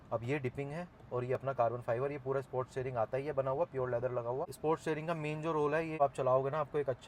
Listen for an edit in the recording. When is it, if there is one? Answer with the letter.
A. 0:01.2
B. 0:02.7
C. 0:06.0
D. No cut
C